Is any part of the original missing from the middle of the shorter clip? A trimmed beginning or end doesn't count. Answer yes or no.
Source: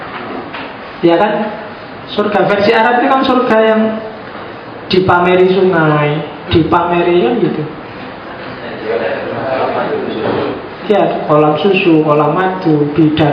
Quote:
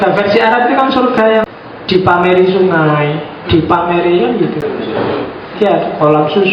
yes